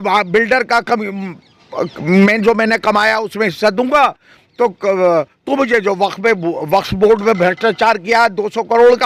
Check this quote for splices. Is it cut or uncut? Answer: uncut